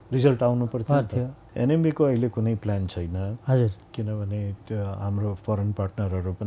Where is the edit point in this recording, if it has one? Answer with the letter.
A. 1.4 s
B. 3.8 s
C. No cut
A